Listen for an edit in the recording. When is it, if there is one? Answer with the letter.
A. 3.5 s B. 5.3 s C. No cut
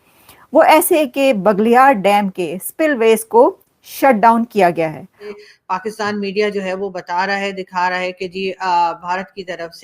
B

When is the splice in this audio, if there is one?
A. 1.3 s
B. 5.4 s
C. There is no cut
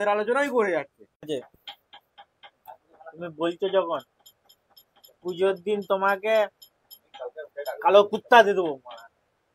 A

